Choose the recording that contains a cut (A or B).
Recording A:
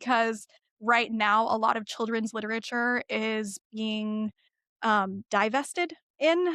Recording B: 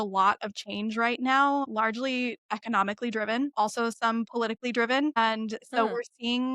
B